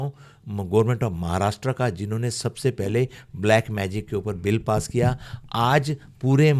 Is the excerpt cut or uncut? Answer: uncut